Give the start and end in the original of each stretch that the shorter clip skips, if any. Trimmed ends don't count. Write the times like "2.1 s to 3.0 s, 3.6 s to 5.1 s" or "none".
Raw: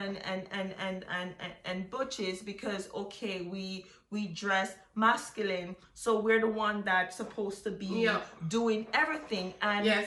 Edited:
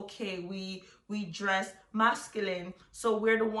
none